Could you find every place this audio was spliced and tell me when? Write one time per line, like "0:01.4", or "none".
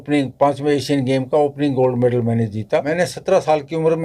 0:02.9

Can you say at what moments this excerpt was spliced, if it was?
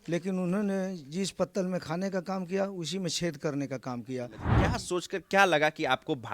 0:04.4

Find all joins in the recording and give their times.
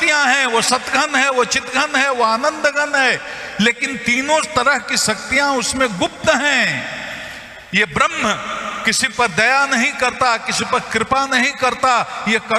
none

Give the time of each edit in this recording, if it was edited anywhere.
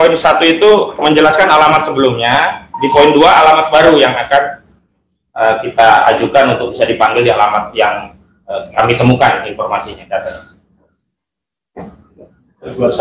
none

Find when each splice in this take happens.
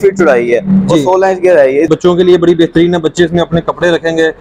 0:01.9

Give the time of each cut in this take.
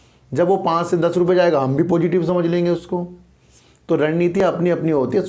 none

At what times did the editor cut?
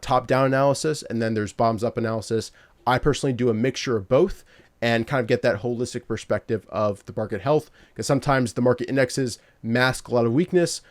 none

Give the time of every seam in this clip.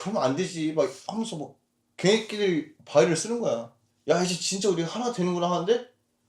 0:03.8

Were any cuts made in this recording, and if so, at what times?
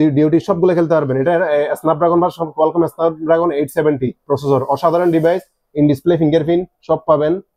none

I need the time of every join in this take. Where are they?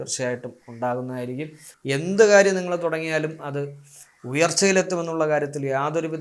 0:01.7

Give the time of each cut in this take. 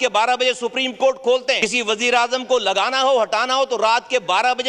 0:01.6

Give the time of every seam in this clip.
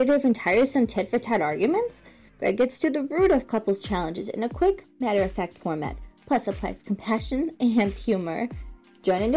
none

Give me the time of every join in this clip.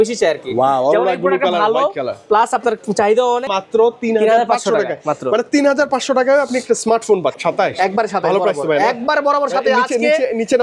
0:03.5
0:07.4

